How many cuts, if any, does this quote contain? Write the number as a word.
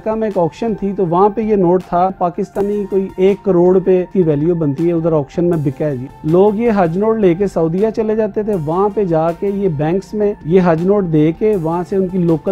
four